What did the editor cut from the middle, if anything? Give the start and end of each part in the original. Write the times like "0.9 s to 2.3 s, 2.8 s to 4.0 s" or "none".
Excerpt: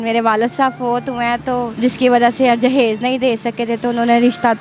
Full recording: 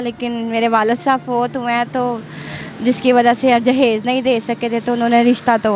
2.2 s to 2.8 s

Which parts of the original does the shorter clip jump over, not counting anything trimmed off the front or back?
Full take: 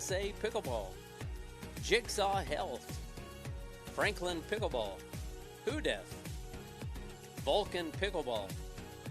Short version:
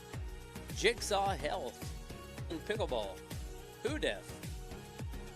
3.6 s to 4.3 s

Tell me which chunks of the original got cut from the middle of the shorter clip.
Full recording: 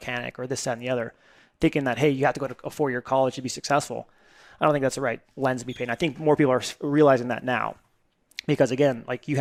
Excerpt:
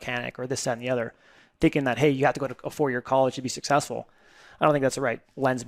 none

